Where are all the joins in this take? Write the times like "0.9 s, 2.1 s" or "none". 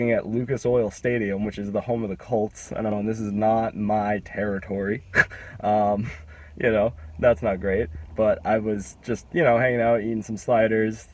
2.9 s